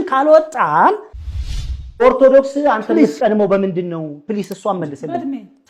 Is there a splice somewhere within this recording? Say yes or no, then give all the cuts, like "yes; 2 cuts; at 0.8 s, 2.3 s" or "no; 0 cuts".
yes; 1 cut; at 1.4 s